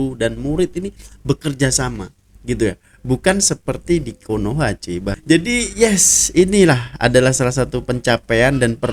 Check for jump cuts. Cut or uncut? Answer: uncut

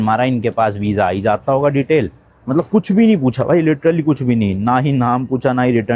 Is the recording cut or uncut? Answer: uncut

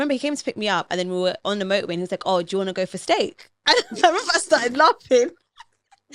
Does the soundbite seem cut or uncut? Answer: uncut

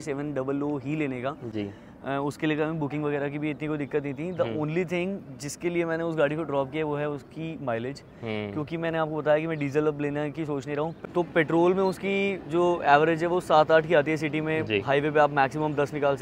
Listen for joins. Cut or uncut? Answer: uncut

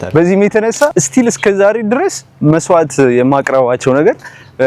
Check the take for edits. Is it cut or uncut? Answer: cut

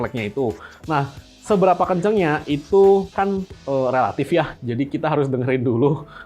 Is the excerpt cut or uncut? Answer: uncut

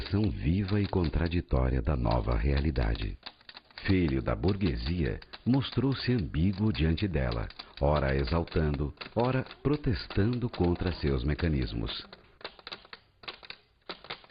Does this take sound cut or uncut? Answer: cut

